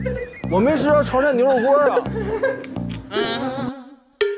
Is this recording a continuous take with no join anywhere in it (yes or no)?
yes